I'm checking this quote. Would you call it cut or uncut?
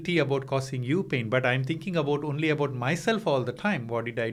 uncut